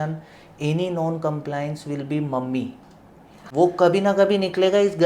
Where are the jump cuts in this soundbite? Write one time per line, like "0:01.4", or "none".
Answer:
0:03.4

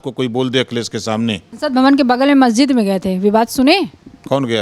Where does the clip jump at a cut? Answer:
0:01.5

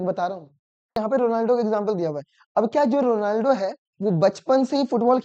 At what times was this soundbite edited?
0:01.0

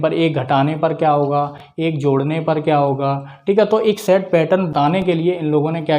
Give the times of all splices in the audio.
0:04.7

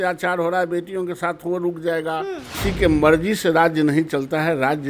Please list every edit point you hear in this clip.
0:02.6

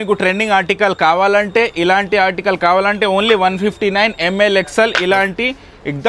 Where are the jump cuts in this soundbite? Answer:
none

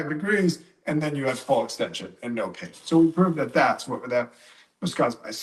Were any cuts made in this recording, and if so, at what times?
none

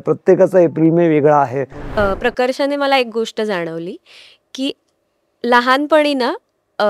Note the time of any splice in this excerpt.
0:01.9

